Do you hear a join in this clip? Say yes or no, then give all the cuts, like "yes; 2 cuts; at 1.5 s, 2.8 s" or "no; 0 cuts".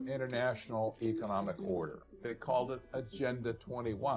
yes; 1 cut; at 2.1 s